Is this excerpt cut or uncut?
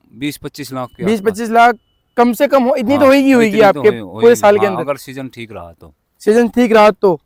uncut